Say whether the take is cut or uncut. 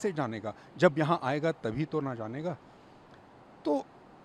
uncut